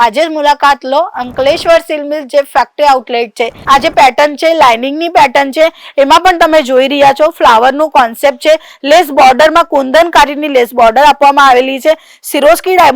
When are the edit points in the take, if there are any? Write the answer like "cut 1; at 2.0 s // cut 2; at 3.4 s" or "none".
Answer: cut 1; at 3.5 s